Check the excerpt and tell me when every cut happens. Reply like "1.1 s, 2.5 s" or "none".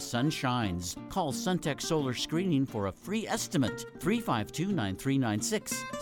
none